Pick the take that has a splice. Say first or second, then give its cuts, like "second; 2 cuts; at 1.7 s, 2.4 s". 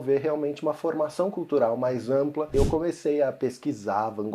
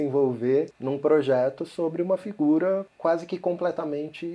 first; 1 cut; at 2.5 s